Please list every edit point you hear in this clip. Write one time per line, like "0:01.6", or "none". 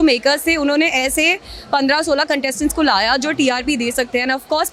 none